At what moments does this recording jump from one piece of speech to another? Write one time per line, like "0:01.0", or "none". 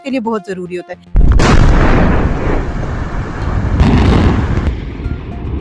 none